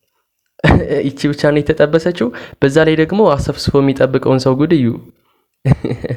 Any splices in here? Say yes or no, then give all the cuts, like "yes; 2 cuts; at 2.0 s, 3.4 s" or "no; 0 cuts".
no; 0 cuts